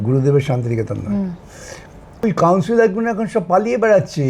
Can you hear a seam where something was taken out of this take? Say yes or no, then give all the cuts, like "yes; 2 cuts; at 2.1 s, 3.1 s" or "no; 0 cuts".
yes; 1 cut; at 2.2 s